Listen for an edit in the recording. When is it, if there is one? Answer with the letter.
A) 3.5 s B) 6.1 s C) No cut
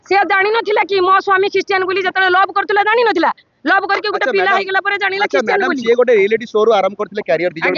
C